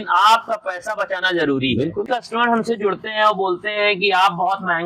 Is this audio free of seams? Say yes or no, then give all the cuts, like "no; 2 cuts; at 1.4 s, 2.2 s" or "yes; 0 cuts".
no; 1 cut; at 2.1 s